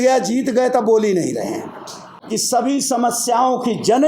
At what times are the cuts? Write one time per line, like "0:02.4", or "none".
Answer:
0:02.1